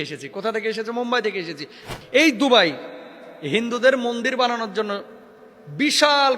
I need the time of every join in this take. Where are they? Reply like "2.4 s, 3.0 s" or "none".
1.9 s